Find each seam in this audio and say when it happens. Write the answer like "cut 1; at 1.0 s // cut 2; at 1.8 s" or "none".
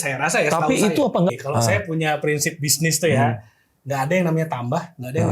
cut 1; at 1.3 s